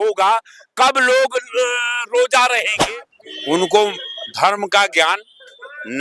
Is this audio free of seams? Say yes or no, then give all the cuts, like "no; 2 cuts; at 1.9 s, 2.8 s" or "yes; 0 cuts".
no; 1 cut; at 2.8 s